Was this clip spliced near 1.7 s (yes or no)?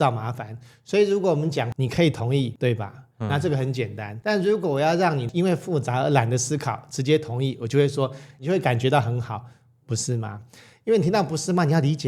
yes